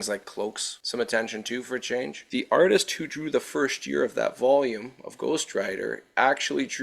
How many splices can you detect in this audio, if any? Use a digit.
1